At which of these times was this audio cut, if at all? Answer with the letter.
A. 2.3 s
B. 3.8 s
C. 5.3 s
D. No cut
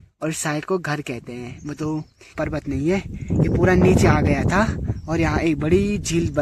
A